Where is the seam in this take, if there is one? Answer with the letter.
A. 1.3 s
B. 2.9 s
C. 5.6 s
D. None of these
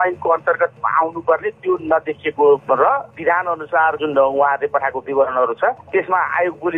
B